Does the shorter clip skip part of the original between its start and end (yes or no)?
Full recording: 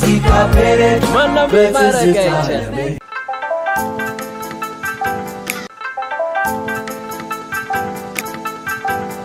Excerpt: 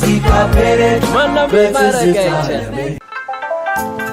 no